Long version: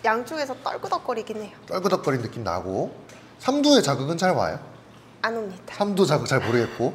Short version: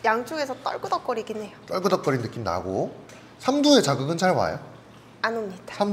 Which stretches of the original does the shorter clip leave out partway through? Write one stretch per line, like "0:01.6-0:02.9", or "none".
none